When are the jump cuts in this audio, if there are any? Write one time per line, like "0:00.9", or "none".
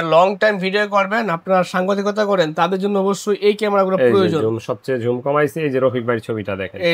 none